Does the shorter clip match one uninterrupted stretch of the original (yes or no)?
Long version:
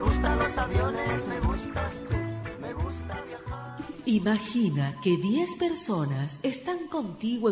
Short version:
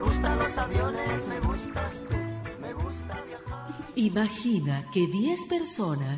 no